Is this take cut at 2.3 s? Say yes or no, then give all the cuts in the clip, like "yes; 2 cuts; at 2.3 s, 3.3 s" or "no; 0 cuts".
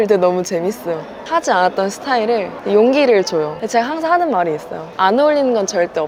no; 1 cut; at 3.6 s